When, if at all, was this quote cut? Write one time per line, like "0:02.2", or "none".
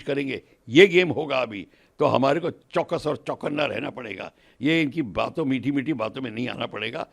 none